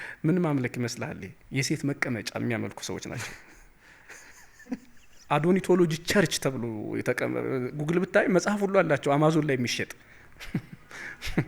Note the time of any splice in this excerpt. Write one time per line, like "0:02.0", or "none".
0:01.3